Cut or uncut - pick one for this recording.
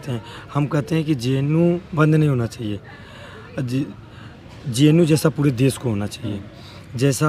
uncut